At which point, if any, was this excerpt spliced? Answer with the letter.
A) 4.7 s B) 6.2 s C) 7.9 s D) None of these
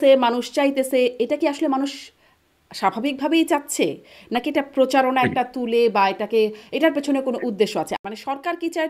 C